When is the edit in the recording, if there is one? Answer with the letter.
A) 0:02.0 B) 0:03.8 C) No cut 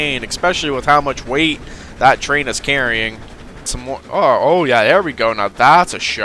B